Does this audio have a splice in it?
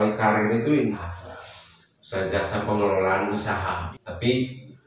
yes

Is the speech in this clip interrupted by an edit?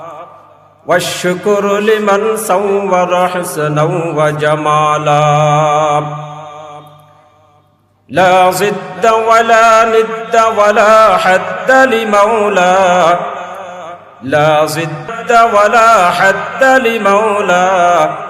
yes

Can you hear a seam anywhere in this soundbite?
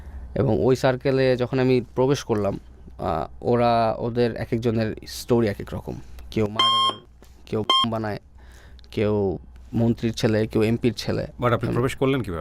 no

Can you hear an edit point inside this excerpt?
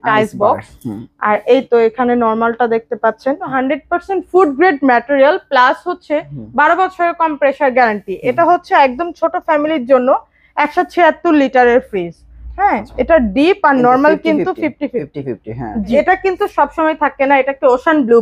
yes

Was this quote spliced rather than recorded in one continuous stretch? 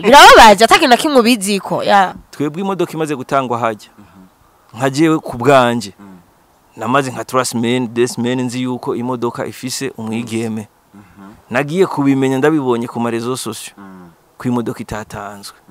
yes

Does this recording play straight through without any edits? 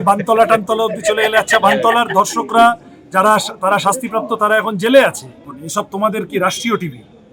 no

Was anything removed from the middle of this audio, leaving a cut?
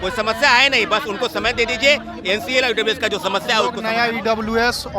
yes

